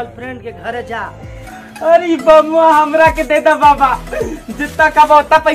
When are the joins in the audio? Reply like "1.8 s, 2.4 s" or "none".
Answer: 1.4 s